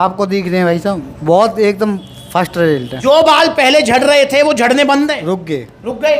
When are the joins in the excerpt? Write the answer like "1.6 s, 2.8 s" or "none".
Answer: 2.9 s